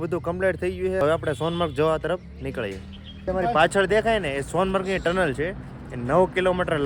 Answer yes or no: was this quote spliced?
yes